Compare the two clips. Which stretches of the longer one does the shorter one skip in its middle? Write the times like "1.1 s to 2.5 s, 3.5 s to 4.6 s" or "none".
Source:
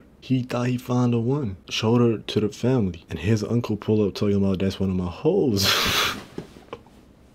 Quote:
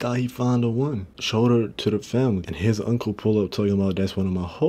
3.0 s to 3.1 s